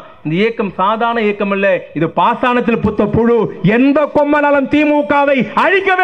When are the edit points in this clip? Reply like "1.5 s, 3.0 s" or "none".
none